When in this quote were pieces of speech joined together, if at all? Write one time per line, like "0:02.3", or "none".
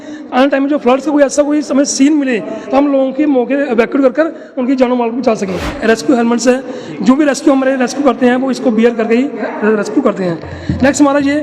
0:05.7